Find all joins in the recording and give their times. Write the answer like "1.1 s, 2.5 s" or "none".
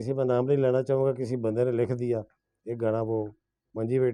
none